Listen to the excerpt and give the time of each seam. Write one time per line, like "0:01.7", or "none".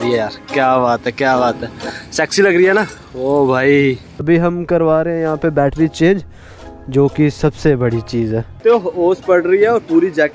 0:04.2
0:08.5